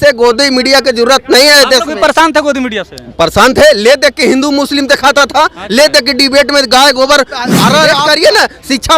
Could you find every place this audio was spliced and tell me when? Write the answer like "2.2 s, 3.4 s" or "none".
7.9 s